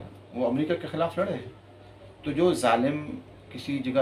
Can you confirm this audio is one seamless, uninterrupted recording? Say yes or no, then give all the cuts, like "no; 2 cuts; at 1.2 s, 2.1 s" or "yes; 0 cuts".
yes; 0 cuts